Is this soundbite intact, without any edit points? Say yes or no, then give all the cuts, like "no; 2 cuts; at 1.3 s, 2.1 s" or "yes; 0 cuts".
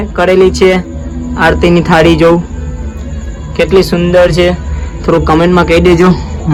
yes; 0 cuts